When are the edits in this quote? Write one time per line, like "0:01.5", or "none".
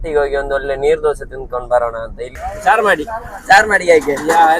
0:02.5